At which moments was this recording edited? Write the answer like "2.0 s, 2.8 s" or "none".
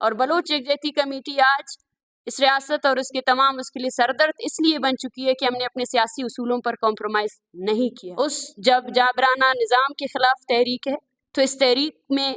8.0 s